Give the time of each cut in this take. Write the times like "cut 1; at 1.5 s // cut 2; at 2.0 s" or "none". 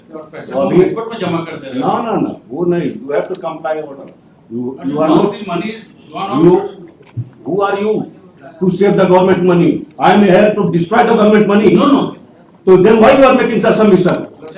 none